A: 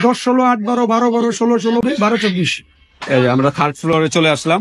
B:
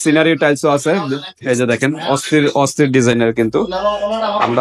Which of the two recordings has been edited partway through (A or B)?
A